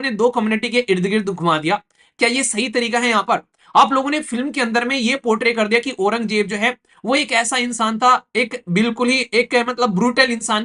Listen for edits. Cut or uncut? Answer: uncut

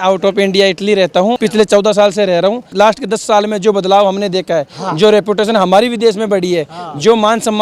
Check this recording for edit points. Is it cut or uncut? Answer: cut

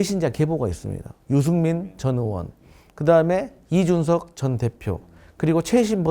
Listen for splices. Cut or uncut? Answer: cut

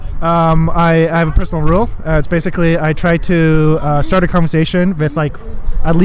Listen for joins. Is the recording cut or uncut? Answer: uncut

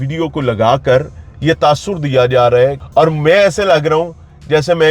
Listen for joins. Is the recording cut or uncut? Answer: cut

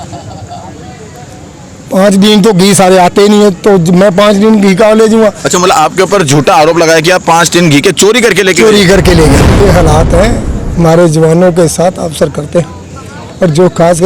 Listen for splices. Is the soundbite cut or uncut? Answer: cut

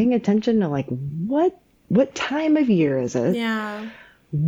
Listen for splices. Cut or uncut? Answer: cut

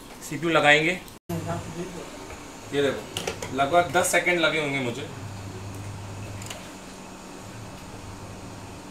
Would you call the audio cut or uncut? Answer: cut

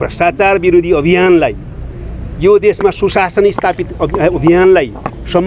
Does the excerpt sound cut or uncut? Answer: uncut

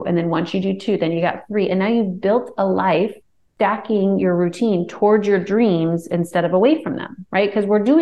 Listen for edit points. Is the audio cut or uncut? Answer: uncut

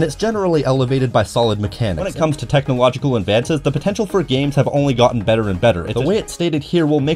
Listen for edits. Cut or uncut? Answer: cut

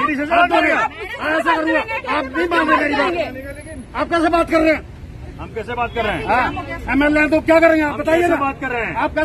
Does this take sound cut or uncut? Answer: cut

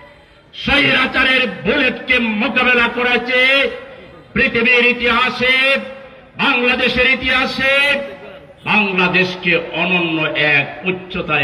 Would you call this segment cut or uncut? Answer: uncut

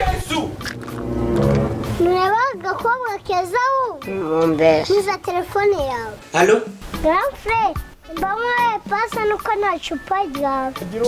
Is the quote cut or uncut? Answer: cut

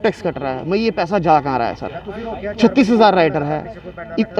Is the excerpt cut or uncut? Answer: uncut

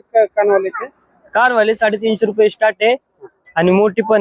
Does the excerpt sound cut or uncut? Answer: uncut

